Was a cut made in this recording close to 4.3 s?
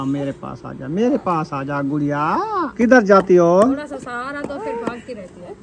no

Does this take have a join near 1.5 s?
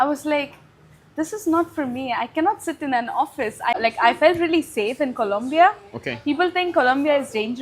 no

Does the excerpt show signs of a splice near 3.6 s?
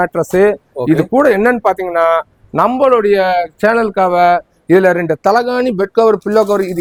no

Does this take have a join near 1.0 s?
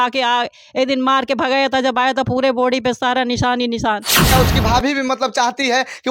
no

